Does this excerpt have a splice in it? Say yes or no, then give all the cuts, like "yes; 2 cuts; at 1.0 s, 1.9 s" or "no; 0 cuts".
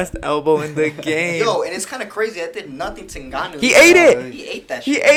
no; 0 cuts